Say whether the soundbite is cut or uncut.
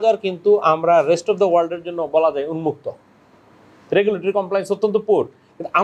uncut